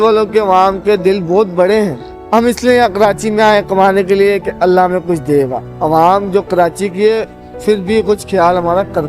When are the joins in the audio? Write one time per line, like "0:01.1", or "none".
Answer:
0:02.1
0:05.6